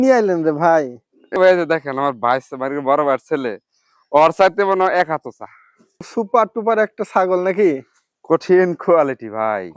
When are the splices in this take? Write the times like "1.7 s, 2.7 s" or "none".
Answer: 1.3 s, 6.1 s

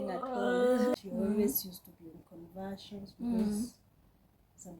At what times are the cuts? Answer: 0.9 s

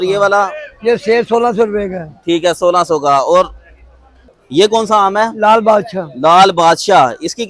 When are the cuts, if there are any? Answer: none

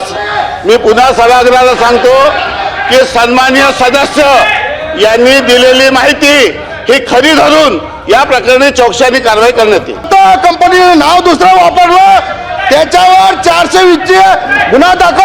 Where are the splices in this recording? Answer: 10.1 s

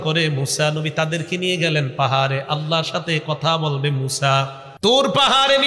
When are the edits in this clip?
4.6 s

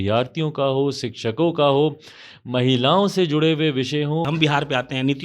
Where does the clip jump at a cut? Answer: 4.3 s

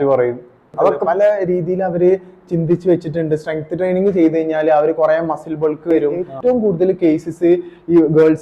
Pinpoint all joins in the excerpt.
1.0 s, 6.3 s

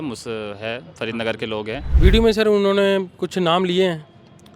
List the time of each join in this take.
1.9 s

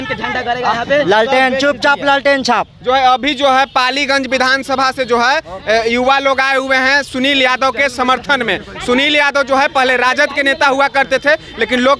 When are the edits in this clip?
none

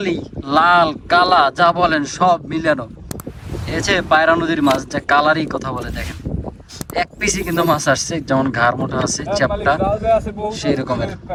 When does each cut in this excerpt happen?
none

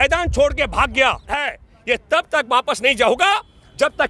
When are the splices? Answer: 1.4 s

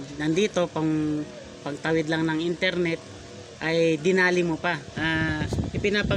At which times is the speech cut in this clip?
4.9 s

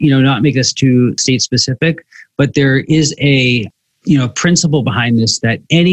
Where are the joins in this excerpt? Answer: 1.2 s

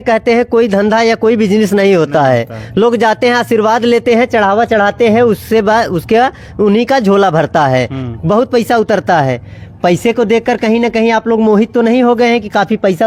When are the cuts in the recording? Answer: none

